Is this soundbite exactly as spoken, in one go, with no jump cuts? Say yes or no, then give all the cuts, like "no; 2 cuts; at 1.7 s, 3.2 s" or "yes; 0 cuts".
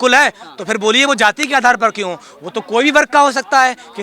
yes; 0 cuts